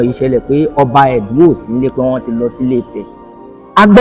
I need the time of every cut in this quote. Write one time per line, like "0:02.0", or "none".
none